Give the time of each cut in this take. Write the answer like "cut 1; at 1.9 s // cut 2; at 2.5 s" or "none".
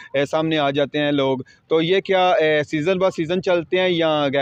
none

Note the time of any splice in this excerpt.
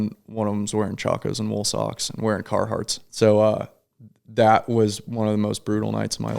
cut 1; at 3.0 s

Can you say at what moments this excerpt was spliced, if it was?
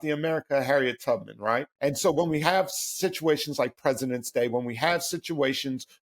cut 1; at 1.7 s

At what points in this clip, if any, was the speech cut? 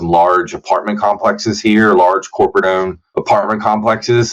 none

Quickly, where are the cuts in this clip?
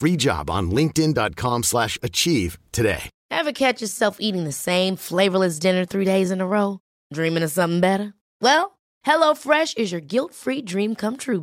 cut 1; at 3.1 s

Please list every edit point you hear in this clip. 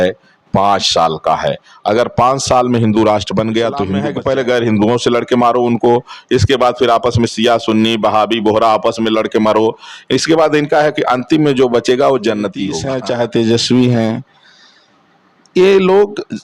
cut 1; at 4.0 s // cut 2; at 12.8 s

